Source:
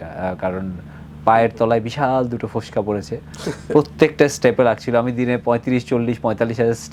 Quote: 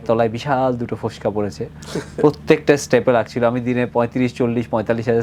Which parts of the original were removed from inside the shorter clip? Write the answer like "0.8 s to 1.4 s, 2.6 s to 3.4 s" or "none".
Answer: none